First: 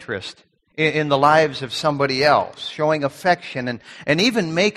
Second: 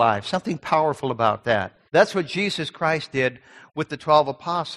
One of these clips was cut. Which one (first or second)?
second